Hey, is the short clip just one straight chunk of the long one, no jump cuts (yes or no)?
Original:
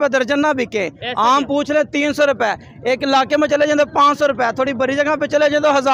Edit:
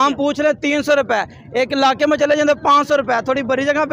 yes